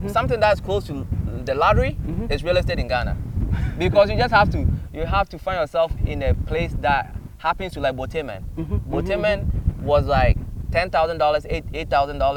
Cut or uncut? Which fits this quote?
uncut